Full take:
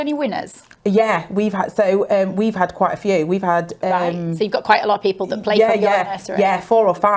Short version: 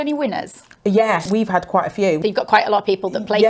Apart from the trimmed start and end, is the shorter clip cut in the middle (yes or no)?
yes